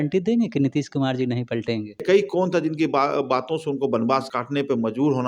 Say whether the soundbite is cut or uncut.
cut